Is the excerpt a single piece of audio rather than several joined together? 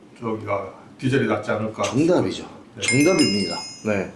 yes; 0 cuts

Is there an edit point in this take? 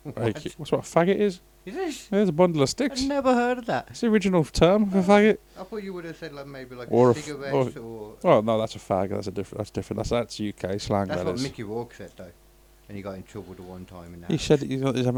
no; 0 cuts

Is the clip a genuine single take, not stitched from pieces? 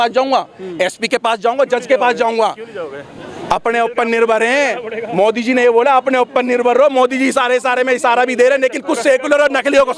yes; 0 cuts

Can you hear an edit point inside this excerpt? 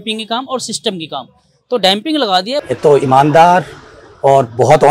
yes; 1 cut; at 2.6 s

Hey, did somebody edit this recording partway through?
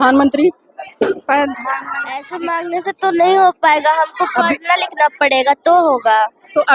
yes; 1 cut; at 2.3 s

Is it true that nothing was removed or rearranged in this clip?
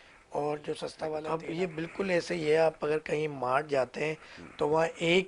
no; 1 cut; at 1.2 s

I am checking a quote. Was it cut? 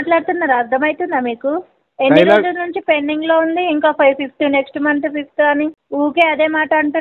yes; 1 cut; at 5.8 s

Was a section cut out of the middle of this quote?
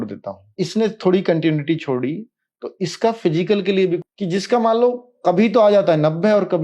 yes; 1 cut; at 4.0 s

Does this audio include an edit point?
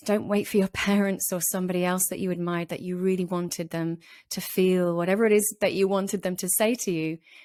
no; 0 cuts

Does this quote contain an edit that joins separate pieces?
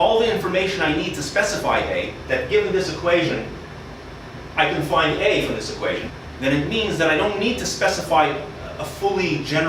yes; 1 cut; at 6.1 s

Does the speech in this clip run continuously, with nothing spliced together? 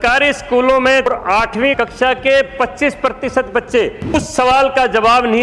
no; 2 cuts; at 1.5 s, 4.1 s

